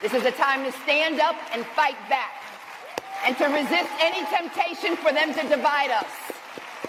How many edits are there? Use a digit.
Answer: 0